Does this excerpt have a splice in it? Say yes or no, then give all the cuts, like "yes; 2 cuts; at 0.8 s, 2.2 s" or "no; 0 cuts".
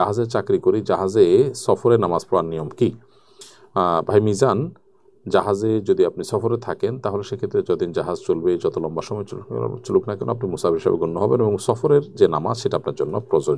no; 0 cuts